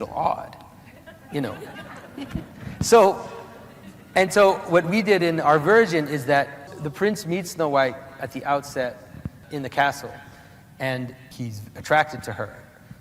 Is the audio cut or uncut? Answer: cut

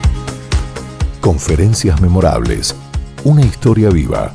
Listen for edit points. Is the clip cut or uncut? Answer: uncut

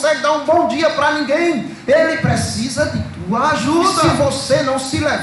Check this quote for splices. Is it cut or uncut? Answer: cut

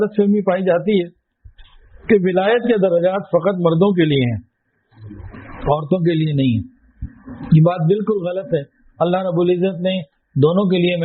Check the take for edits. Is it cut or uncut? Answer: uncut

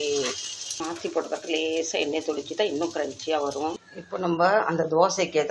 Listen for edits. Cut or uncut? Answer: uncut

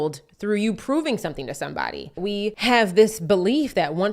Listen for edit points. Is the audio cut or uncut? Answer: cut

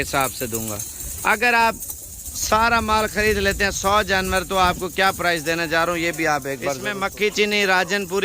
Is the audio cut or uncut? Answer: cut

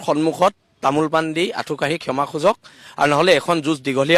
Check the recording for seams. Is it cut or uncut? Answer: uncut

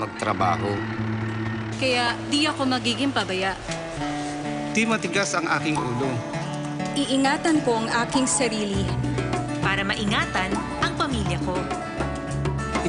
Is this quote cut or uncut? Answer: uncut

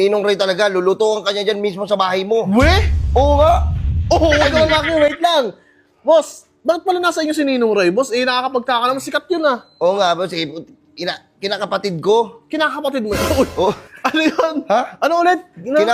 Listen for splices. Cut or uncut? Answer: uncut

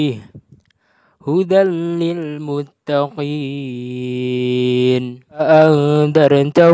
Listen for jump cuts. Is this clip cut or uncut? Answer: cut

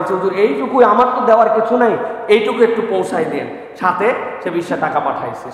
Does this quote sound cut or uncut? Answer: uncut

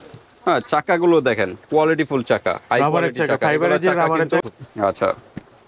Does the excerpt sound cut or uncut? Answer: cut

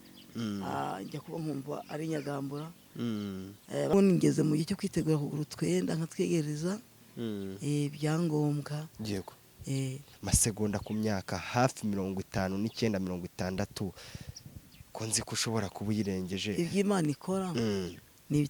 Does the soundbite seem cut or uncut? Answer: cut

